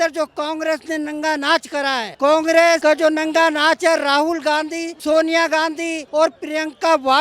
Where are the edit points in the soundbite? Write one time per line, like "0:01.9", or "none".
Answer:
0:02.1
0:02.8
0:04.9
0:06.0